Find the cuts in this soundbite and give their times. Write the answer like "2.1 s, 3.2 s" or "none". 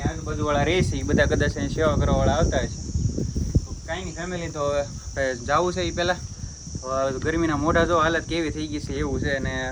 none